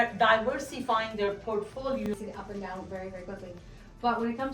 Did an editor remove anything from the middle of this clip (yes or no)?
yes